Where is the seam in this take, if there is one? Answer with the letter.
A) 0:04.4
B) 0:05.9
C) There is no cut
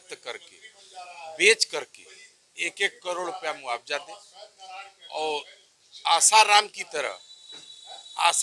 C